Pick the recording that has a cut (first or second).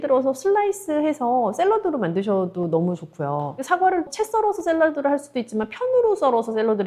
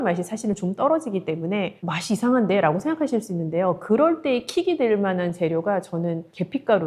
first